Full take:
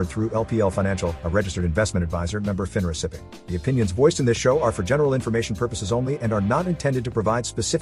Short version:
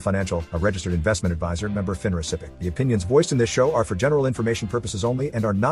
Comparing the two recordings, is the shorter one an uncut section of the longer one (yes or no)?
no